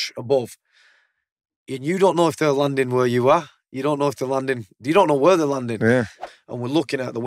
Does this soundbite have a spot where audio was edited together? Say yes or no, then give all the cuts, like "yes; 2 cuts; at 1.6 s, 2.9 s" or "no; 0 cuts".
yes; 1 cut; at 6.2 s